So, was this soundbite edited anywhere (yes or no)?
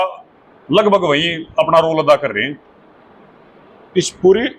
no